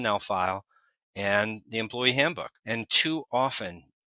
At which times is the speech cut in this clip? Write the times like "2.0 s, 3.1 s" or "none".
2.5 s